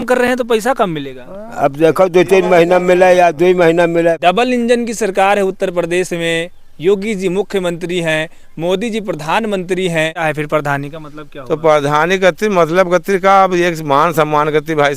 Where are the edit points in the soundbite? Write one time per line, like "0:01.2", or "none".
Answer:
0:04.2
0:10.2

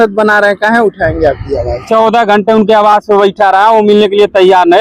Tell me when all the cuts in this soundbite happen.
0:01.8

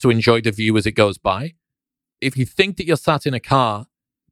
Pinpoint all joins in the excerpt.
0:02.1

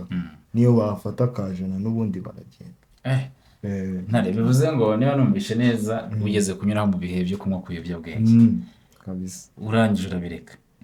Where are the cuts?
none

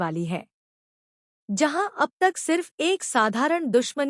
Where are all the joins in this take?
0:02.0

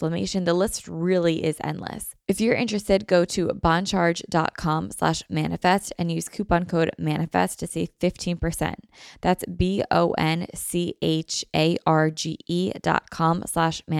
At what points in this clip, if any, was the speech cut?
0:02.1

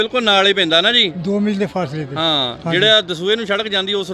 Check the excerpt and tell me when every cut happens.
none

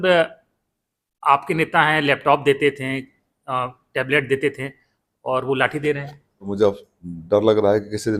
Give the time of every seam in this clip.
0:06.5

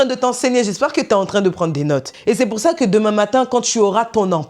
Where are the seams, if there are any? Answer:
0:02.1

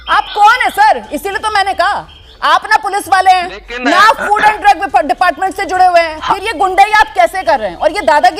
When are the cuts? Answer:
none

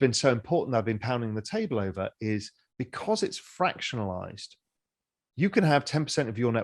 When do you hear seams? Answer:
none

